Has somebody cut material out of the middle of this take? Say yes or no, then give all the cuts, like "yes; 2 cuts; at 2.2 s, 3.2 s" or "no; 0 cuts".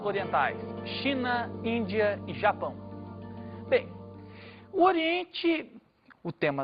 no; 0 cuts